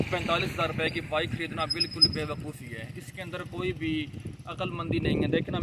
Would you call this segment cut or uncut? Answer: uncut